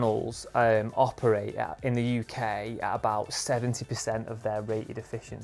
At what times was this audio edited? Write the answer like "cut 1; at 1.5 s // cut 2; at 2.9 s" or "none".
none